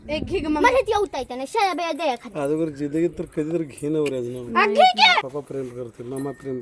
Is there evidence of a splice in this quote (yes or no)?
yes